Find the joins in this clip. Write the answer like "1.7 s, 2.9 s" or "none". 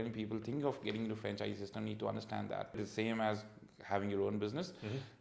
2.8 s